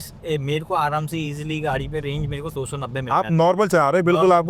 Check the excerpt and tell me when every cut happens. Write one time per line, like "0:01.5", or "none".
none